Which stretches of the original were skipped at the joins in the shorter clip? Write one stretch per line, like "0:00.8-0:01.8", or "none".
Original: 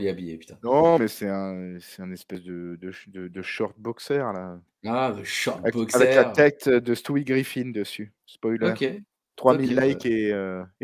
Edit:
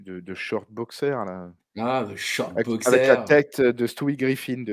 none

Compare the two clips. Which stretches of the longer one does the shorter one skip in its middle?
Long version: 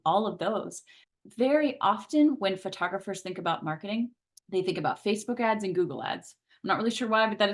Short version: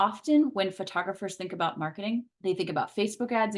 0:04.2-0:04.4

